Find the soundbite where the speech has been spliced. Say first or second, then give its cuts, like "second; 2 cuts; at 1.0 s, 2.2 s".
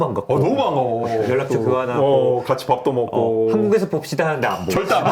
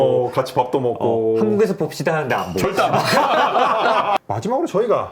second; 1 cut; at 4.2 s